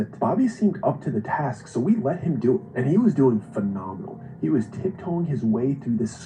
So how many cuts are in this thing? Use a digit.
1